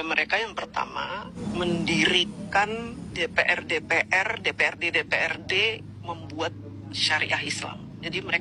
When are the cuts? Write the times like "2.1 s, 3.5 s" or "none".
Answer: 1.4 s, 3.0 s